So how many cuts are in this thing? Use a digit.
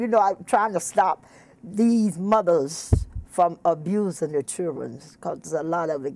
0